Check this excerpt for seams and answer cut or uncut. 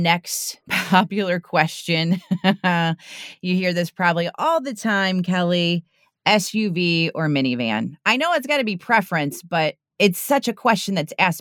uncut